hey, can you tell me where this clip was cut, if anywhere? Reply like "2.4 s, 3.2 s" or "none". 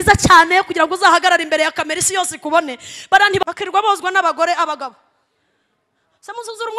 3.4 s